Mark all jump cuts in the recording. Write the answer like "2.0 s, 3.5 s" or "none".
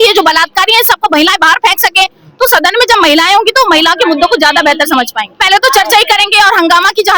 5.4 s